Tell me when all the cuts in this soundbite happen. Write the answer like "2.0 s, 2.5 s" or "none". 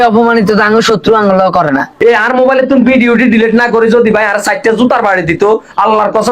1.9 s